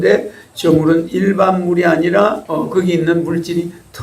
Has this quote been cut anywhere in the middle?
yes; 1 cut; at 2.4 s

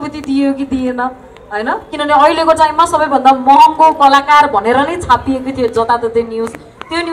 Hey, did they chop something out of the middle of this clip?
no; 0 cuts

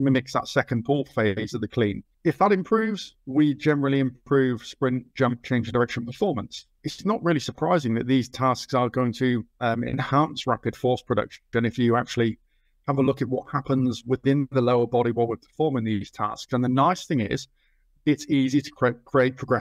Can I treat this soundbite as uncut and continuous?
yes; 0 cuts

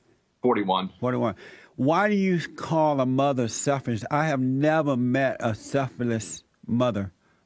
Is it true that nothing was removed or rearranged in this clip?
yes; 0 cuts

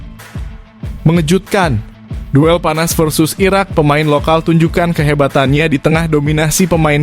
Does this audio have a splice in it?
yes; 1 cut; at 1.0 s

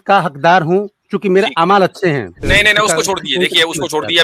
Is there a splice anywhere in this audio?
yes; 1 cut; at 2.3 s

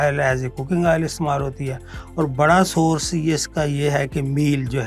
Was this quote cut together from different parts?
no; 0 cuts

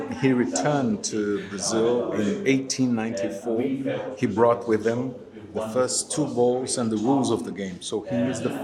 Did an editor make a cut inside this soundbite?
no; 0 cuts

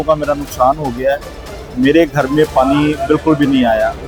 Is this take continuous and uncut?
yes; 0 cuts

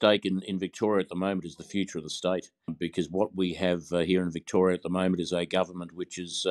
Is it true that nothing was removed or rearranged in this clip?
no; 1 cut; at 2.7 s

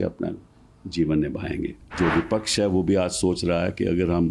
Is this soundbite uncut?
no; 1 cut; at 1.9 s

